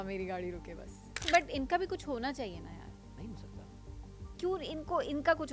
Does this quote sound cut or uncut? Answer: cut